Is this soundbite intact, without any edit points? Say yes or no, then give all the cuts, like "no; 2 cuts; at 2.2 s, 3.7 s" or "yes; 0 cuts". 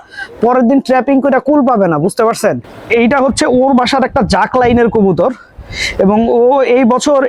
no; 1 cut; at 2.7 s